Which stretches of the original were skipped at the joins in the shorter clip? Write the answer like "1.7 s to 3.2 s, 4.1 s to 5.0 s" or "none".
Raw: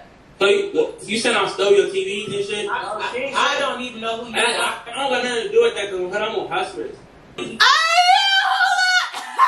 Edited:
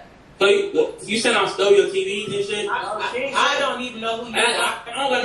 none